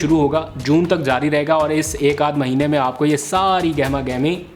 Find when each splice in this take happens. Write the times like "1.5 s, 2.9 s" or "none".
none